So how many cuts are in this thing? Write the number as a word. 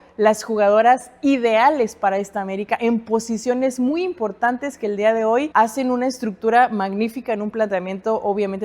one